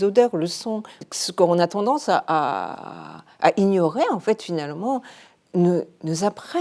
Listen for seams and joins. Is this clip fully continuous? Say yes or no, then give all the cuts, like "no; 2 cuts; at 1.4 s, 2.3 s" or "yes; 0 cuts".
no; 1 cut; at 0.9 s